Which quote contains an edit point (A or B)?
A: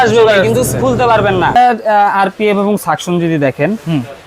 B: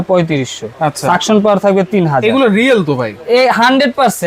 A